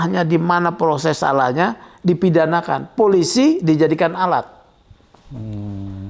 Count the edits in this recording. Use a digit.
0